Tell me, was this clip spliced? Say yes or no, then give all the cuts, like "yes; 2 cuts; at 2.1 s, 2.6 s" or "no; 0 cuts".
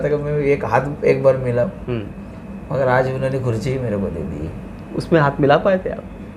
no; 0 cuts